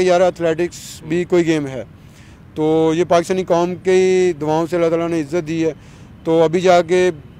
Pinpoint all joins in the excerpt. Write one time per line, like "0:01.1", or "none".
none

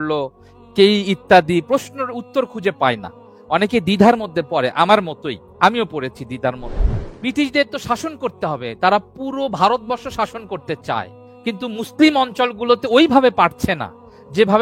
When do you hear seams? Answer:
0:07.0
0:11.2

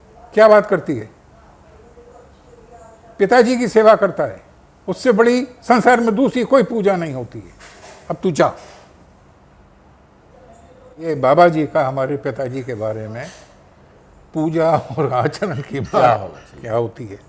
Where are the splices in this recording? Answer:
none

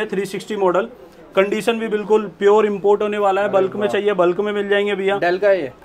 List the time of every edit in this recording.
none

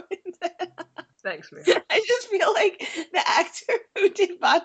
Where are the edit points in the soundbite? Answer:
0:01.1

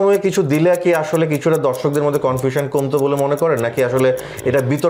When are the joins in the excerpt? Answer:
none

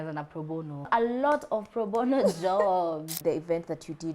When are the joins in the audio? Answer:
0:00.9
0:03.1

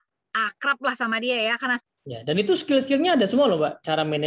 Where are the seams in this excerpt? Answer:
0:01.8

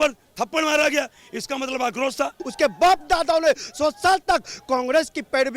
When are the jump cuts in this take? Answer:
0:02.4

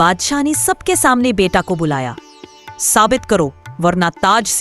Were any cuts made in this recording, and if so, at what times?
none

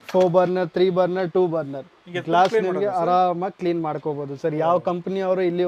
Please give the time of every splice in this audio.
none

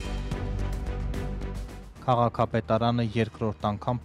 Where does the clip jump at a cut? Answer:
0:01.8

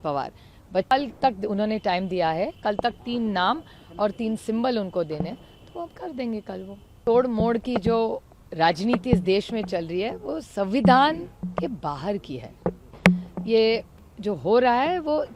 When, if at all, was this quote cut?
0:00.9
0:07.0

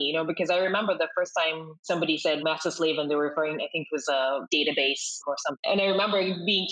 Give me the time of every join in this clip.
0:05.5

